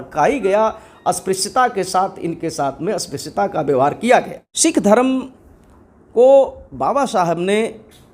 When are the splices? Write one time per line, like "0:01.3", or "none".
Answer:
0:04.4

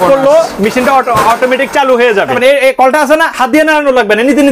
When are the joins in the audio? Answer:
0:02.3

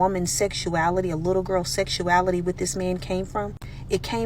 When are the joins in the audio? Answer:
0:03.3

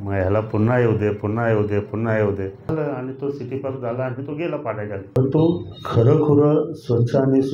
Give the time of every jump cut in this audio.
0:02.6
0:05.2

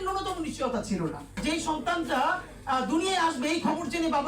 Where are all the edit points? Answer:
0:01.4

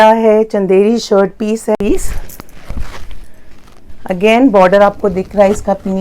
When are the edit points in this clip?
0:01.8

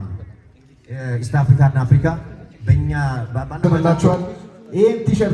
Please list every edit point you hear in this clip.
0:03.9

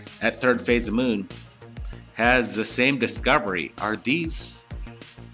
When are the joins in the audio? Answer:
0:04.4

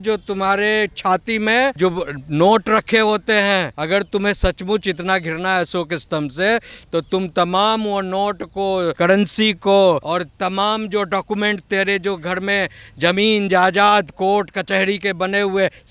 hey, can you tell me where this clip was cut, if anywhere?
0:01.8
0:03.7
0:08.9
0:10.0

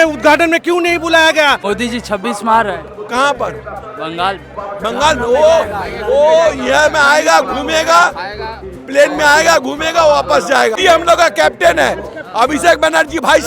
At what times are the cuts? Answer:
0:01.6
0:10.8

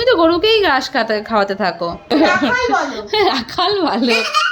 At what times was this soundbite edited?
0:02.1

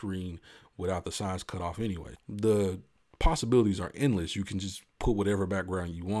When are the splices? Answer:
0:02.1

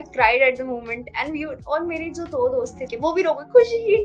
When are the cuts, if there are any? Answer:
0:02.8

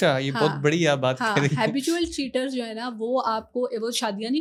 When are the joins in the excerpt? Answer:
none

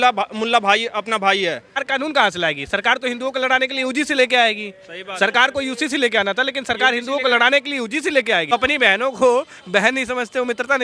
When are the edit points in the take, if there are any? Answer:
0:01.8
0:08.5

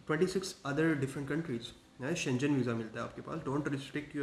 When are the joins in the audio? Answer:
none

